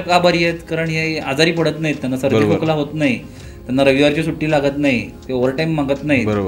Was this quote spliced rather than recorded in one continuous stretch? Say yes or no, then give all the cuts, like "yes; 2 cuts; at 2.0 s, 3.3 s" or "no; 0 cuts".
no; 0 cuts